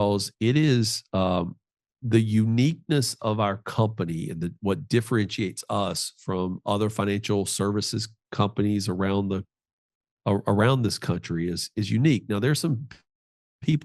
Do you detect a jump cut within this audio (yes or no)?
no